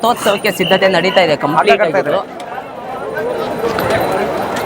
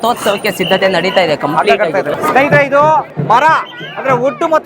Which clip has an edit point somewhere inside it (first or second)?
second